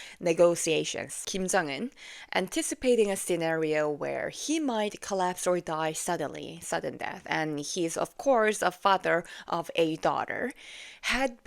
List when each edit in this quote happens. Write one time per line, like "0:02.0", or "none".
0:01.2